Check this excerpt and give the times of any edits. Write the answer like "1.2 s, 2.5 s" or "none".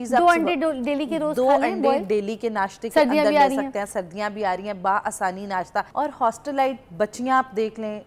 5.9 s